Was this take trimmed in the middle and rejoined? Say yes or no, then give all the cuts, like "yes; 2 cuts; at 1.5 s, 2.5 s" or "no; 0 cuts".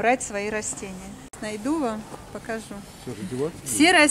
yes; 1 cut; at 1.3 s